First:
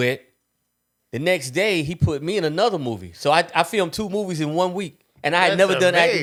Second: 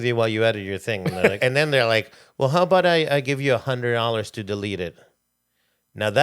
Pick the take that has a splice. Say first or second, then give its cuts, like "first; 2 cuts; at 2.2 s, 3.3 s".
second; 1 cut; at 1.4 s